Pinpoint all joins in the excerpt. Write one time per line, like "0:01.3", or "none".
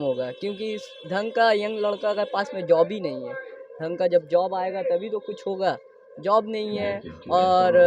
none